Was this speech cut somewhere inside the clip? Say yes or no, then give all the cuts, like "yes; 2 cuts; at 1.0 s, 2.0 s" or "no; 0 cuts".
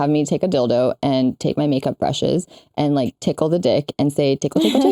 no; 0 cuts